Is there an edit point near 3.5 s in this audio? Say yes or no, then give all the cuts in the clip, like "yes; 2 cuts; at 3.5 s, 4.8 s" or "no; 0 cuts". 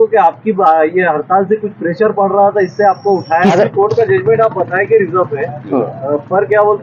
yes; 1 cut; at 3.5 s